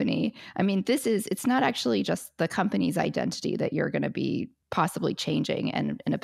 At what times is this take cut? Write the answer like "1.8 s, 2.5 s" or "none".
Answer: 4.5 s